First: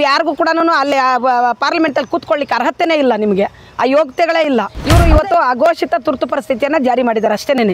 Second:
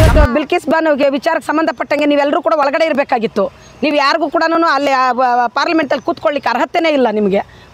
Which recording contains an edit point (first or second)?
first